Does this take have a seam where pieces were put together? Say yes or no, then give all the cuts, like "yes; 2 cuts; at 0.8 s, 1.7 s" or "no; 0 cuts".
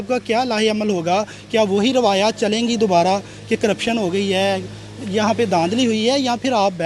no; 0 cuts